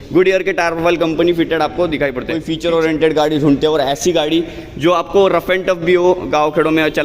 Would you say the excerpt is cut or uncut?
cut